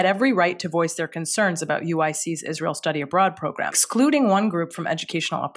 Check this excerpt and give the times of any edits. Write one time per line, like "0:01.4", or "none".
0:03.8